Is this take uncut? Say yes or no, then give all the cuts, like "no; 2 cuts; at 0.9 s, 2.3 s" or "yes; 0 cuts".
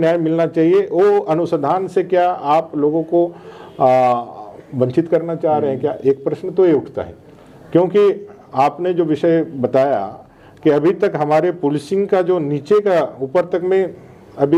yes; 0 cuts